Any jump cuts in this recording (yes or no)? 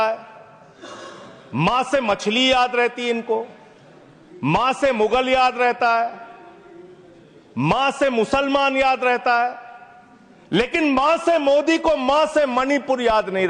no